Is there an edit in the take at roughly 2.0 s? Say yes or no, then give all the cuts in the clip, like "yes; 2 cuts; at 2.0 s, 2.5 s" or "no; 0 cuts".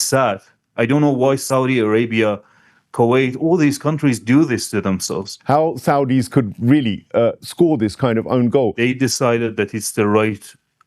no; 2 cuts; at 5.3 s, 8.8 s